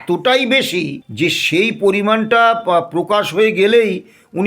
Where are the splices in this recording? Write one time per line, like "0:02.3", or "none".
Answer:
0:01.0